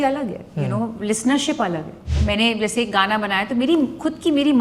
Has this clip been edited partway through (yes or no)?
yes